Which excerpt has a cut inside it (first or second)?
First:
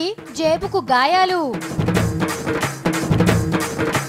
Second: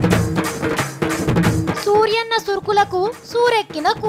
second